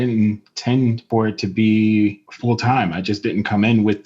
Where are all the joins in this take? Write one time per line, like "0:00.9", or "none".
0:01.0
0:02.3